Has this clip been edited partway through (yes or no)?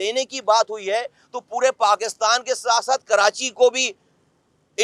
no